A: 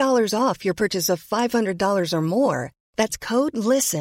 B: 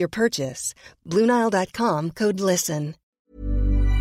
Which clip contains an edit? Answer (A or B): B